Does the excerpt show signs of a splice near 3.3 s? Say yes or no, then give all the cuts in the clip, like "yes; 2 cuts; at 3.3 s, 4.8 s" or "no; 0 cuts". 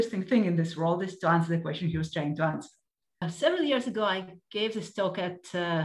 yes; 1 cut; at 3.3 s